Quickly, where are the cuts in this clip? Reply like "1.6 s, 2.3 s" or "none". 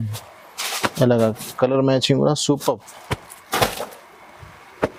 none